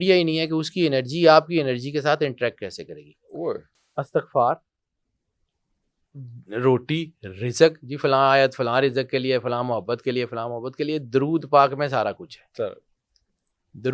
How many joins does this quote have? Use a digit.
1